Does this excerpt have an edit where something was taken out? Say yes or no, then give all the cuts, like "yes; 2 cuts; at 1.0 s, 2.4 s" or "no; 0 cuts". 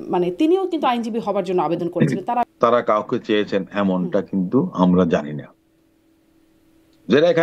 yes; 1 cut; at 2.4 s